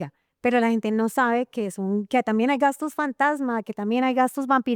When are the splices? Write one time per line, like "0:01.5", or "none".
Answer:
none